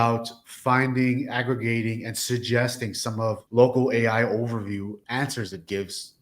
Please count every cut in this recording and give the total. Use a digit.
2